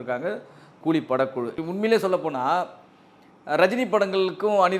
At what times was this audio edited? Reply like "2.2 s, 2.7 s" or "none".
1.6 s